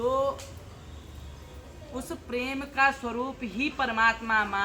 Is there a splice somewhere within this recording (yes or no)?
no